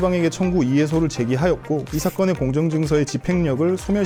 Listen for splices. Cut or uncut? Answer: uncut